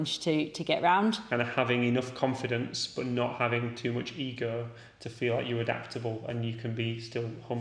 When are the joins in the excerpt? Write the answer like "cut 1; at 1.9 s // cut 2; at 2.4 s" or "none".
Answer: cut 1; at 1.3 s